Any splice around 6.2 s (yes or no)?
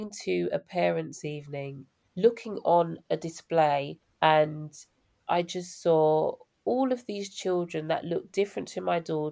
no